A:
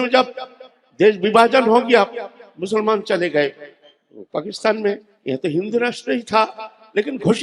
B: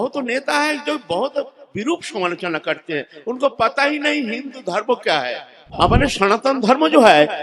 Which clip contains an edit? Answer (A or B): B